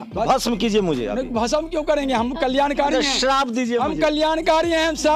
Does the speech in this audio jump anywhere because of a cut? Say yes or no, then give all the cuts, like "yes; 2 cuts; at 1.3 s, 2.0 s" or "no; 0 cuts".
yes; 1 cut; at 1.3 s